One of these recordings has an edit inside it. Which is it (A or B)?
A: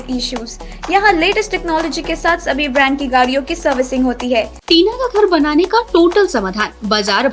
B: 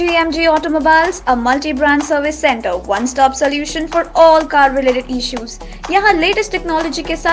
A